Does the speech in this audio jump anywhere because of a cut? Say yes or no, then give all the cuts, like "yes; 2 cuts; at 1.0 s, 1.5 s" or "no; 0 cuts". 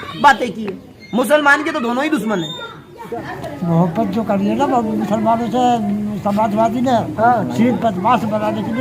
yes; 1 cut; at 3.2 s